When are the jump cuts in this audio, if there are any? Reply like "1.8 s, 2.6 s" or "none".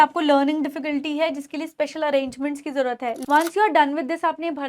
3.2 s

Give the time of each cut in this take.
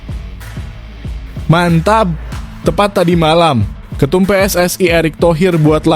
1.5 s

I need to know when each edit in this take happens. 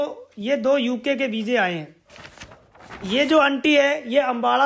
none

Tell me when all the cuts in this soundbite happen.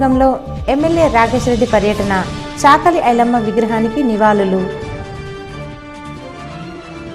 none

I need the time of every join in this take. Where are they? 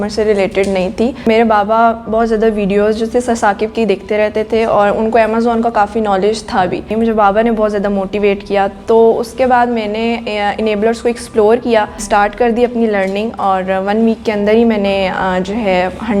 1.3 s, 6.9 s, 12.0 s

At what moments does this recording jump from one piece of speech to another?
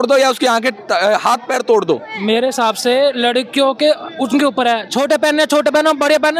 2.1 s

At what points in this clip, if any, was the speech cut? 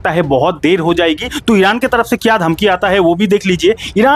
1.3 s

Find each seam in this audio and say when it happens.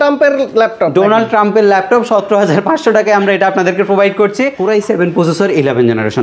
4.6 s

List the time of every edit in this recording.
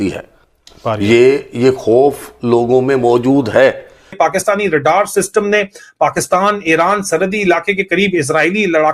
4.1 s

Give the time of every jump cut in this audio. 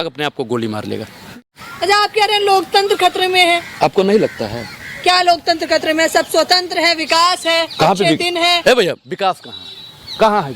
1.2 s

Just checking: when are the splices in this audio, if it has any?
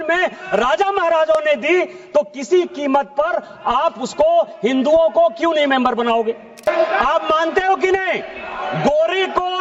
6.7 s

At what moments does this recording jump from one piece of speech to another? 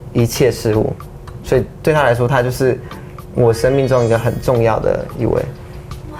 none

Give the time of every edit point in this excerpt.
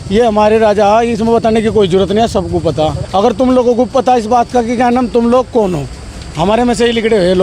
3.0 s

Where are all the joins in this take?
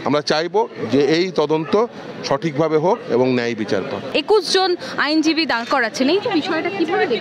4.1 s

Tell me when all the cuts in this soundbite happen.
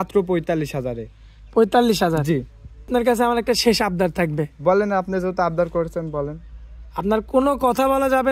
2.9 s

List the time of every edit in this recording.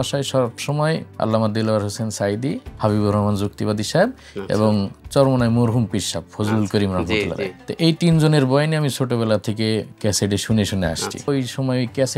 1.1 s, 2.7 s, 7.6 s, 11.3 s

